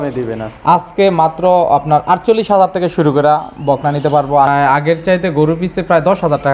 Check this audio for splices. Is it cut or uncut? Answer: cut